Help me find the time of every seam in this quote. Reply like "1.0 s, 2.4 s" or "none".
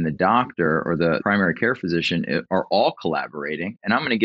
1.2 s

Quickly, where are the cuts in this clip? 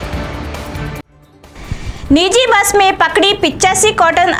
none

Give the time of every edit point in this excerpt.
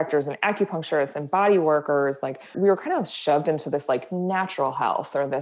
2.5 s

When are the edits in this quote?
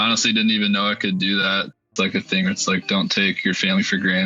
1.9 s

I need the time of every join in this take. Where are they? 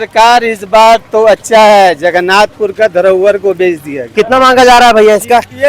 4.0 s

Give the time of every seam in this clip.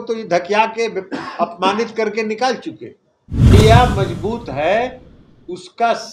3.5 s

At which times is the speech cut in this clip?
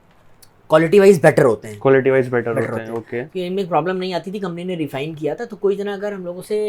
none

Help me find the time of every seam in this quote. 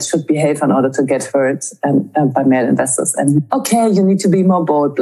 2.3 s, 3.4 s

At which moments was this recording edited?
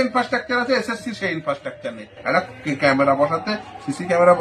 none

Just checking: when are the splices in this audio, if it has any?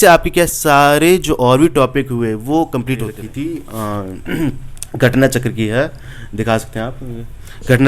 3.2 s

